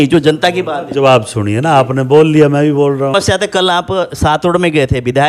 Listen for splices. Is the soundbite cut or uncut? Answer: cut